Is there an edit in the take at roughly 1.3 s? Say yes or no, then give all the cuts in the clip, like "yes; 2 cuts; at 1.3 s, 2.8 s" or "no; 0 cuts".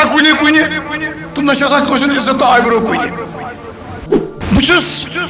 no; 1 cut; at 4.4 s